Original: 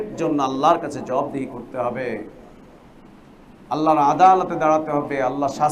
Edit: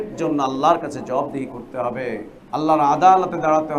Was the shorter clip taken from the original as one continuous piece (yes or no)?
no